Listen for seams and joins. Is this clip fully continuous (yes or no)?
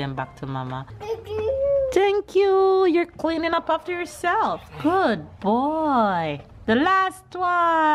no